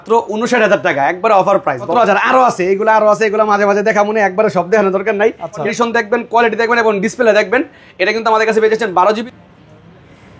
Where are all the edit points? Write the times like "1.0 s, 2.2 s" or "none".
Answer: 1.9 s, 5.7 s, 9.3 s